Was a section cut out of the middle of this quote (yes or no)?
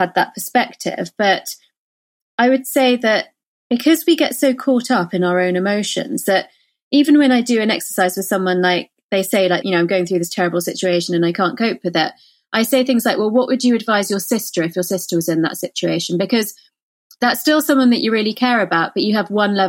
yes